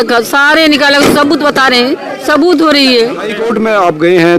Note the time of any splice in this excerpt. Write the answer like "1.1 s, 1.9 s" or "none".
3.3 s